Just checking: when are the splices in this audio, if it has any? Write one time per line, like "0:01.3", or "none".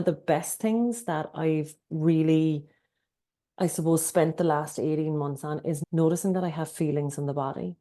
0:05.8